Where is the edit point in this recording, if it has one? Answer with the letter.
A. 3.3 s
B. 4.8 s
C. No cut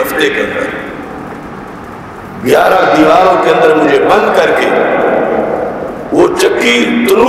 C